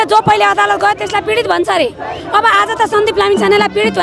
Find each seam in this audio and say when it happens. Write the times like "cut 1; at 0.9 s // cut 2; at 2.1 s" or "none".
none